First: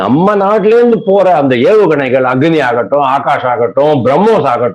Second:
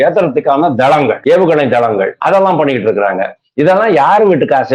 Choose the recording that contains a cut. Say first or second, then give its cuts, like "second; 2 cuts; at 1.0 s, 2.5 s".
second; 2 cuts; at 1.2 s, 2.1 s